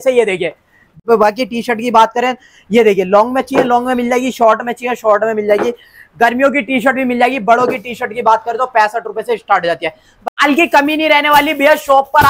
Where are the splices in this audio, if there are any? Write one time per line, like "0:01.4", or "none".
0:01.0
0:10.3